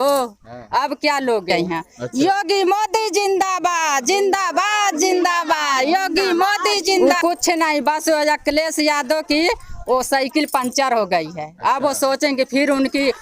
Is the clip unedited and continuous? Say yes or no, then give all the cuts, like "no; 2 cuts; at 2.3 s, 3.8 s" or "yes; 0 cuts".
no; 2 cuts; at 1.9 s, 7.0 s